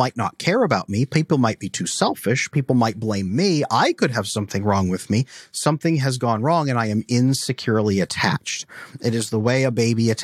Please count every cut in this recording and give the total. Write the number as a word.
zero